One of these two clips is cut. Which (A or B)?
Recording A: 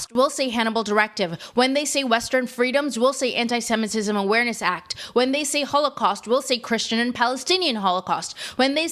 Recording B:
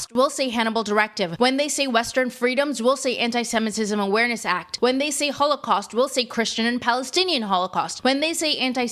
B